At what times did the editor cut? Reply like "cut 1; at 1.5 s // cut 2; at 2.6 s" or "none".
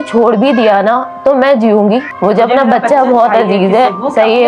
cut 1; at 2.1 s